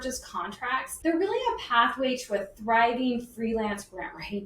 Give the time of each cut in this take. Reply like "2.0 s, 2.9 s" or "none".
0.9 s